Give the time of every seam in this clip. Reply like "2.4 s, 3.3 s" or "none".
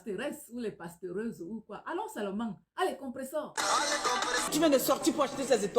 4.5 s